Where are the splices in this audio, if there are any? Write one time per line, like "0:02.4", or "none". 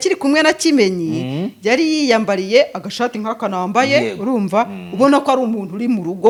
none